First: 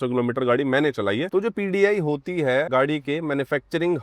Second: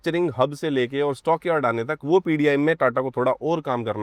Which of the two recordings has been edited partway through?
first; 2 cuts; at 1.3 s, 2.7 s

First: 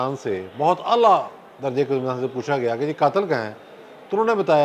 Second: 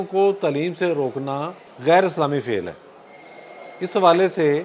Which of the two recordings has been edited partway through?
second; 1 cut; at 1.6 s

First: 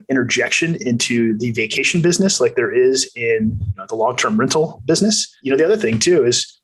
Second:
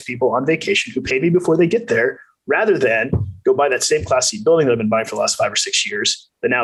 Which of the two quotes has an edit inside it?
first; 1 cut; at 5.4 s

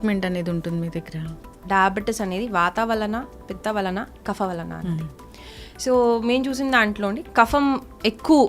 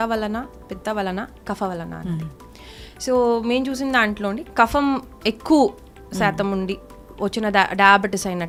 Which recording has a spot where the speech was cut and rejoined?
first; 1 cut; at 1.6 s

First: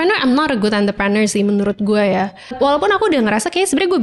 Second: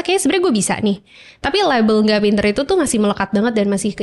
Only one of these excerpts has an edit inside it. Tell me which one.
first; 1 cut; at 2.5 s

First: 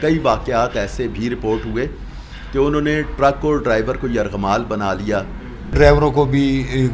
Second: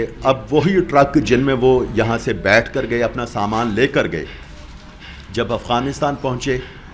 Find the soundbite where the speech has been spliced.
first; 1 cut; at 5.7 s

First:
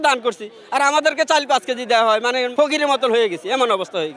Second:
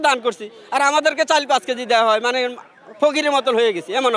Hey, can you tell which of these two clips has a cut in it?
first; 1 cut; at 2.5 s

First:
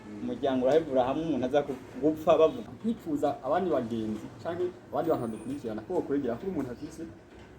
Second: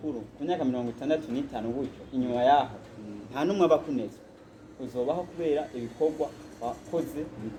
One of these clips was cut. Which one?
first; 1 cut; at 2.6 s

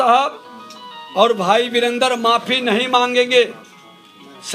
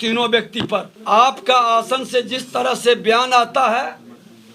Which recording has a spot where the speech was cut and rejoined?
second; 1 cut; at 0.9 s

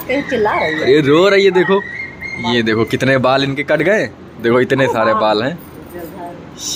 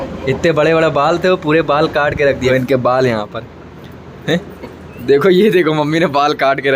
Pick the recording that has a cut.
second; 1 cut; at 2.5 s

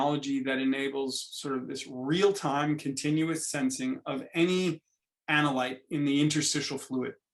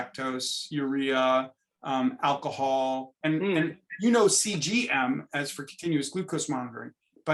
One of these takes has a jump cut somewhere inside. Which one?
second; 1 cut; at 3.1 s

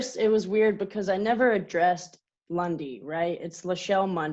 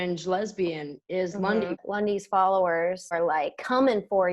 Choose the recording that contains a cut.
second; 2 cuts; at 1.8 s, 3.1 s

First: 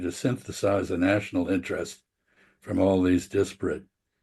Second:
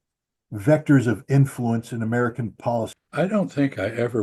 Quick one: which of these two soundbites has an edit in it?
second; 1 cut; at 3.0 s

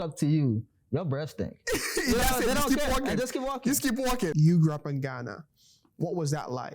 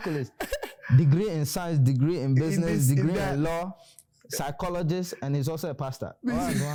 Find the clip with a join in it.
first; 1 cut; at 4.3 s

